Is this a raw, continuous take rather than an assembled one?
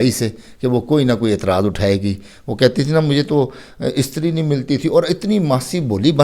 yes; 0 cuts

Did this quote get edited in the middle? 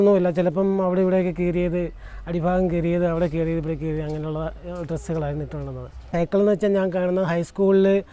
yes; 1 cut; at 6.1 s

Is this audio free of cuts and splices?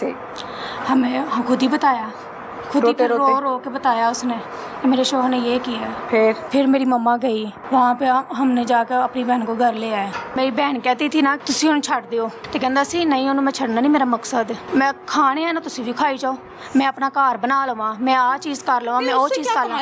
no; 6 cuts; at 6.4 s, 7.5 s, 10.4 s, 11.4 s, 12.4 s, 14.6 s

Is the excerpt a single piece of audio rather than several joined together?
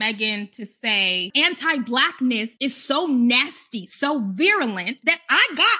no; 3 cuts; at 1.3 s, 2.5 s, 4.9 s

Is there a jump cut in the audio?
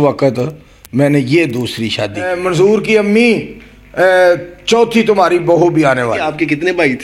yes; 2 cuts; at 2.3 s, 6.2 s

